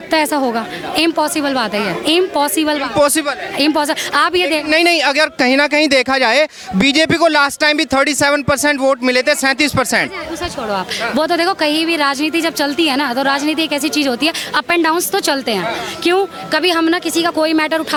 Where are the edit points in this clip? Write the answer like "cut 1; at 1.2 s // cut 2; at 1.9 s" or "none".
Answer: none